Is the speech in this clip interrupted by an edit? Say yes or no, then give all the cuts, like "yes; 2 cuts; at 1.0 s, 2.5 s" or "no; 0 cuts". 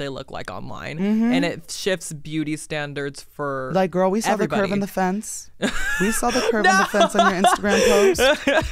no; 0 cuts